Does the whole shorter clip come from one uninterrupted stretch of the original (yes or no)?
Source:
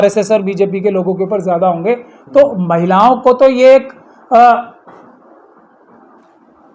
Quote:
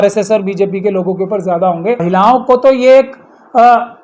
no